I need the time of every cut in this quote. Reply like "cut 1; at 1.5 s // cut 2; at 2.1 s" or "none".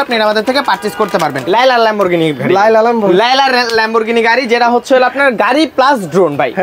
cut 1; at 1.4 s